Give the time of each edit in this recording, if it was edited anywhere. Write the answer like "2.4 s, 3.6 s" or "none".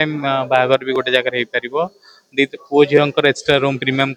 none